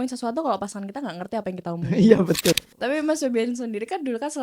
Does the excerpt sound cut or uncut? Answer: cut